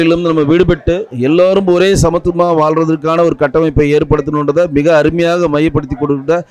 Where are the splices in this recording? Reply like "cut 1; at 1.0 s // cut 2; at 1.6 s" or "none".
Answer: none